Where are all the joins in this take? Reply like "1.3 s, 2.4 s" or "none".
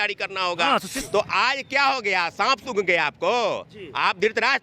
1.0 s